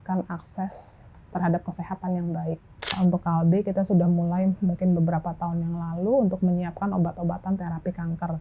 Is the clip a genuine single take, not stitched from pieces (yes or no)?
no